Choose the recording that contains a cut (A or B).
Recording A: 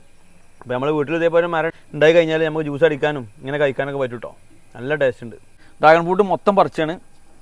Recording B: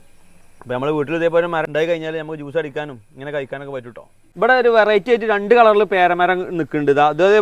B